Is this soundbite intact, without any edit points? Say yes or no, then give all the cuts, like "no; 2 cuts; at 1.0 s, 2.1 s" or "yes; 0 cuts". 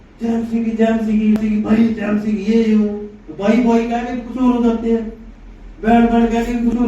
no; 1 cut; at 1.4 s